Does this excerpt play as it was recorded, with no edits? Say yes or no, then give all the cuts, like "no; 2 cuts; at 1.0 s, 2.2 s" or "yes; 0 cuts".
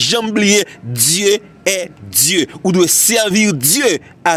yes; 0 cuts